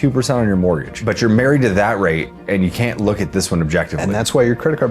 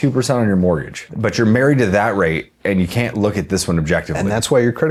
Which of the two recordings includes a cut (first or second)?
first